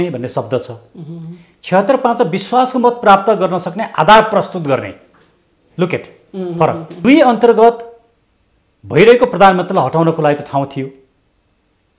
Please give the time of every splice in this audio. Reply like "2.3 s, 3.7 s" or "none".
6.9 s